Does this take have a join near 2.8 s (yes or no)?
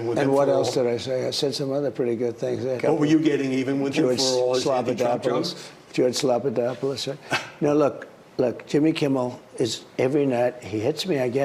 yes